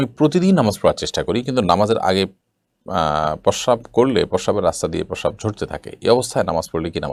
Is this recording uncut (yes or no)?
yes